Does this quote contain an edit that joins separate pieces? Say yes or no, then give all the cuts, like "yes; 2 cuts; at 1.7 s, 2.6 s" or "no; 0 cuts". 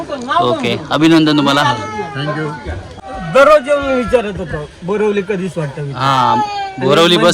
yes; 1 cut; at 2.9 s